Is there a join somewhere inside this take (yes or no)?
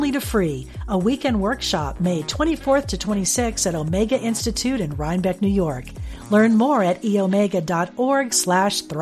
no